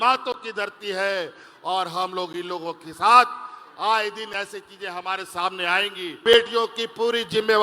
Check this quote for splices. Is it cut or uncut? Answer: cut